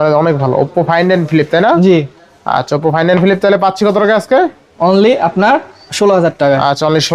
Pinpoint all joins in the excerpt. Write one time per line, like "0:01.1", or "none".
none